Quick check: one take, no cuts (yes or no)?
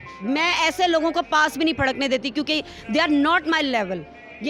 yes